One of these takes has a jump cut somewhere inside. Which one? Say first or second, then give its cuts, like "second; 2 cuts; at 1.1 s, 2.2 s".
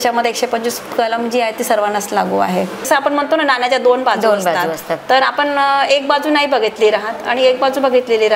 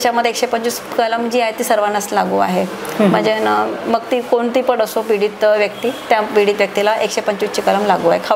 first; 1 cut; at 2.8 s